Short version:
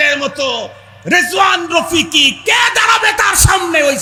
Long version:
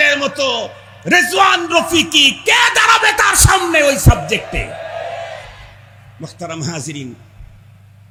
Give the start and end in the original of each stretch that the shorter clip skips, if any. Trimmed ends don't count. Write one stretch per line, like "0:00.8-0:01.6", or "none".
none